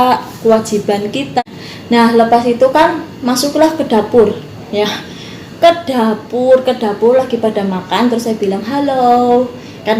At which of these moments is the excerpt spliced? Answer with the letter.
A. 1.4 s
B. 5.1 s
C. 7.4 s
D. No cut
A